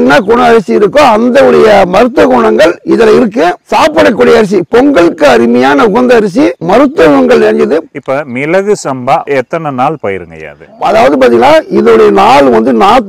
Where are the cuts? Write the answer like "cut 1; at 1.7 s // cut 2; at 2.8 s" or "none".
cut 1; at 7.9 s